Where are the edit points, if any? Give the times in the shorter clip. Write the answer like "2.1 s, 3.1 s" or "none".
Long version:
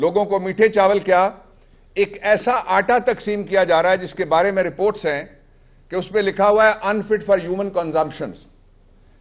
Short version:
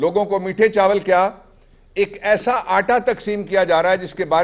none